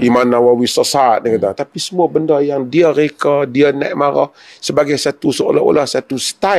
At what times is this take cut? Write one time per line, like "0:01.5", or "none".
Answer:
none

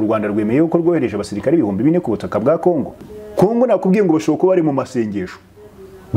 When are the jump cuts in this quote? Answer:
0:03.2

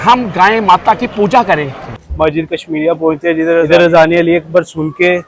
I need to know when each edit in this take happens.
0:01.8
0:03.6

